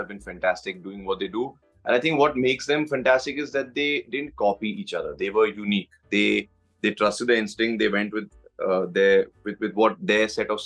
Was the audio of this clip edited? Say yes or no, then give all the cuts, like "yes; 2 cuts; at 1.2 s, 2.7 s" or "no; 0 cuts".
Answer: no; 0 cuts